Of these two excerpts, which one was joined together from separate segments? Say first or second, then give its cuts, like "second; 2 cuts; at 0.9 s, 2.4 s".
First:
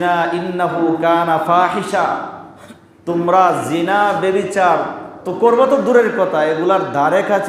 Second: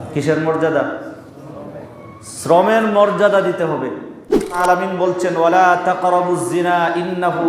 second; 1 cut; at 4.6 s